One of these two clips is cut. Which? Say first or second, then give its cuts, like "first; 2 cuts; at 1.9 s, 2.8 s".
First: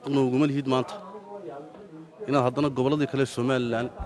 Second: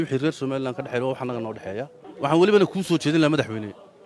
second; 1 cut; at 2.0 s